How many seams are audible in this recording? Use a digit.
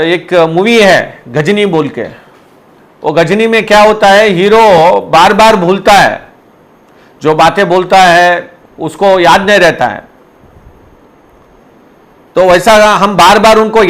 0